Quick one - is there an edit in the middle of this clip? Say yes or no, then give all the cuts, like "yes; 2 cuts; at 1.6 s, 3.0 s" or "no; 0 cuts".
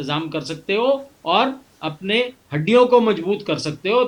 no; 0 cuts